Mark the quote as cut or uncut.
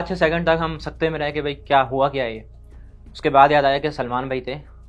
uncut